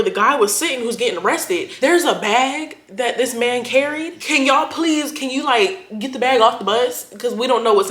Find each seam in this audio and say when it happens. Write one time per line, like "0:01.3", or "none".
0:01.7